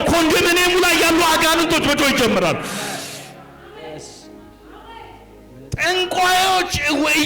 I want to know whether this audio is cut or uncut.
uncut